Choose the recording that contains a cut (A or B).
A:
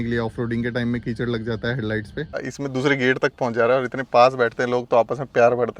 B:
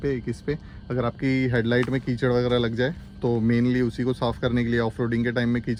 A